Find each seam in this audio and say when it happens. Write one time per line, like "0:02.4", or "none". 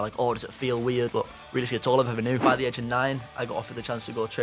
0:01.1
0:02.4